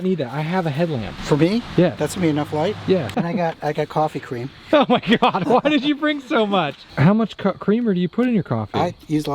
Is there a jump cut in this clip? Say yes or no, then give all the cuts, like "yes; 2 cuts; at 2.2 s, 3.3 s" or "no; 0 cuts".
yes; 4 cuts; at 1.1 s, 2.0 s, 3.1 s, 6.8 s